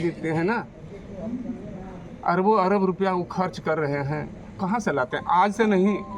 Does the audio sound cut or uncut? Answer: uncut